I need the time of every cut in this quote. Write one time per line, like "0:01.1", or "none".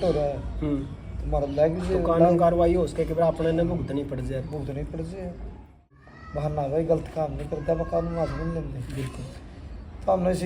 0:06.0